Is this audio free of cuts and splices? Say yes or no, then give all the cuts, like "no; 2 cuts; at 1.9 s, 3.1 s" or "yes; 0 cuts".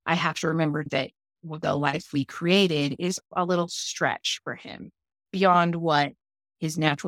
no; 2 cuts; at 0.9 s, 3.3 s